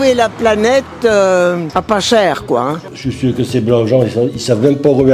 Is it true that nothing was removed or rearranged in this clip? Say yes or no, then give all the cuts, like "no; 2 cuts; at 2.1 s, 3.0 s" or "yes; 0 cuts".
no; 2 cuts; at 1.7 s, 2.9 s